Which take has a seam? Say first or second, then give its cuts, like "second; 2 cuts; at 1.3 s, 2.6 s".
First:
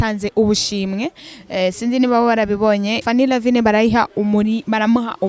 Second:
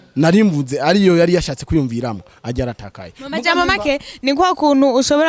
first; 1 cut; at 3.0 s